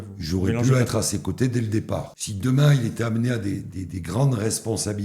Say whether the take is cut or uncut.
cut